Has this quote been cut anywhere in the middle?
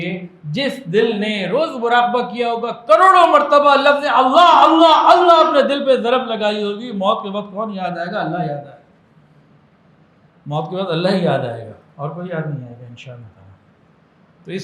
no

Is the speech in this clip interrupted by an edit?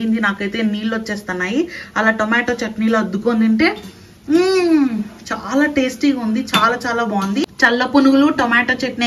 yes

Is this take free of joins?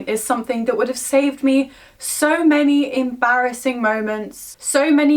yes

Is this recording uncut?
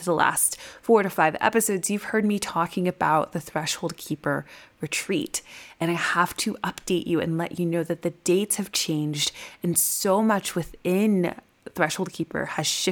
yes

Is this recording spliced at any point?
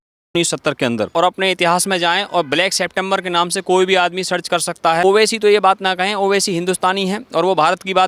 yes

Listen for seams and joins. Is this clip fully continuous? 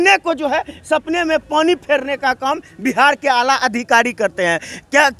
yes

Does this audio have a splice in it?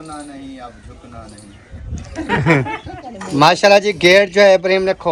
yes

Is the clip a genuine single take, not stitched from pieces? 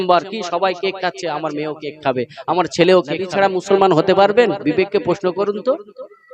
no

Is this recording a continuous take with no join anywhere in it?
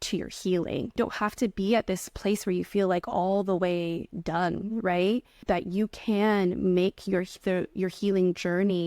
no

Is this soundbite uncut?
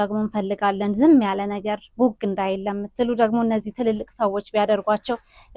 yes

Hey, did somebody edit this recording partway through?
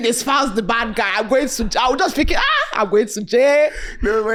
no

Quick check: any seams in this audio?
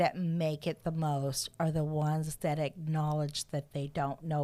no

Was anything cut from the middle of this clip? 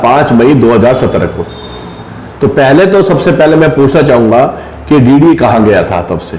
no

